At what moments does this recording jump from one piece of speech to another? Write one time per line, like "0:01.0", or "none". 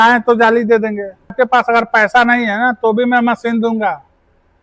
0:01.3